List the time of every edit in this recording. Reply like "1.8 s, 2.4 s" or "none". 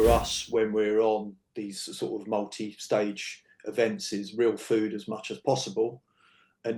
none

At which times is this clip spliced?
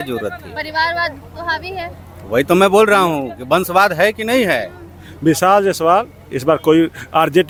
none

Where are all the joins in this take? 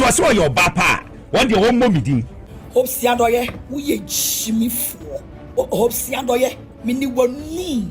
2.4 s, 5.6 s

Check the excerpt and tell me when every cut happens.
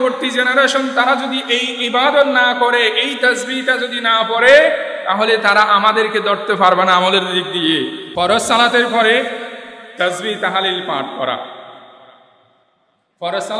8.0 s

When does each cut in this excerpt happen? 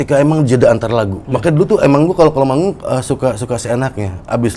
1.2 s

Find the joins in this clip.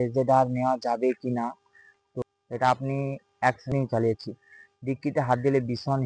2.2 s, 3.7 s

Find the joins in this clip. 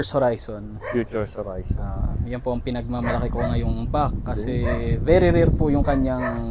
none

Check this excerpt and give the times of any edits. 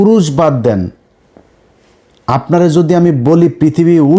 none

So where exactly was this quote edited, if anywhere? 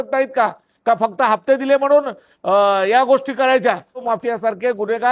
4.0 s

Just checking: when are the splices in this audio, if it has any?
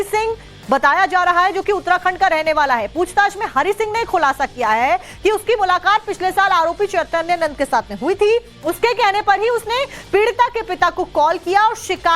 6.3 s

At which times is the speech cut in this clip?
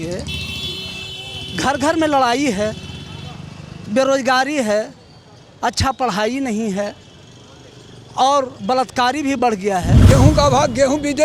10.0 s

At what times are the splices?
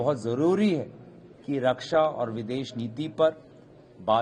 none

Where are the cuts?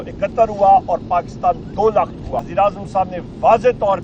2.5 s

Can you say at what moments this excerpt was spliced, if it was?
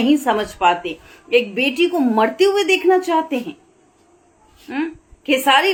none

